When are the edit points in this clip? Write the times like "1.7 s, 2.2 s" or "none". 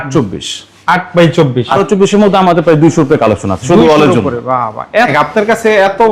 1.8 s, 5.1 s